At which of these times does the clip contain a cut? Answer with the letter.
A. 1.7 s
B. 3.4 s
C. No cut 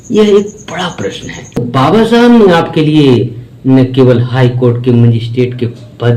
A